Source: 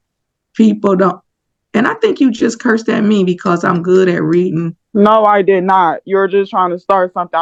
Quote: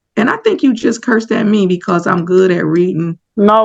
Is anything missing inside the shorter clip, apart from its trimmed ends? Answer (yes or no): no